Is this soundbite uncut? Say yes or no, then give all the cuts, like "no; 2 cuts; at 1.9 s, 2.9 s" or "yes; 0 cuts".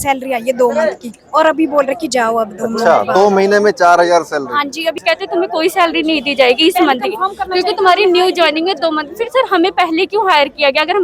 no; 1 cut; at 5.0 s